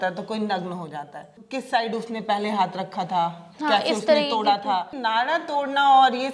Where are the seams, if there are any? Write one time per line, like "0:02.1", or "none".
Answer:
0:01.4
0:05.0